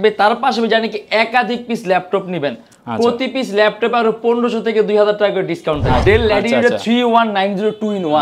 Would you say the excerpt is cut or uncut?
cut